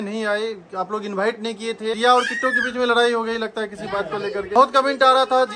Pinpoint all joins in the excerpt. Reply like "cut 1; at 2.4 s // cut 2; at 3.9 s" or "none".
cut 1; at 2.0 s // cut 2; at 4.5 s